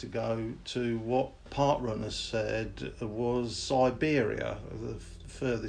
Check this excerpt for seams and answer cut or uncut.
cut